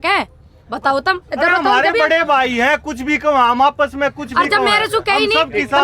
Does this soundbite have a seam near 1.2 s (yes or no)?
no